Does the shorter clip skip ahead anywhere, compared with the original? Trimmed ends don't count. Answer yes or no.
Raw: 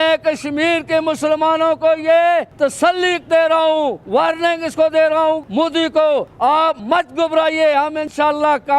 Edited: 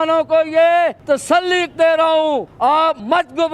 yes